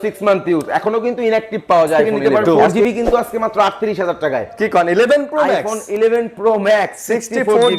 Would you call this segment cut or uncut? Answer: cut